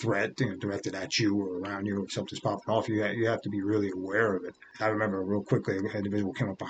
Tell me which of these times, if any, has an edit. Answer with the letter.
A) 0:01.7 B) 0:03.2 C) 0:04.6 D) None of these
C